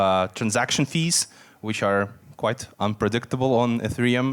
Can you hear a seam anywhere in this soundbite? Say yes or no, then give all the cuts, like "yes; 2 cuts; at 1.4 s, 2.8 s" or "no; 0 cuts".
no; 0 cuts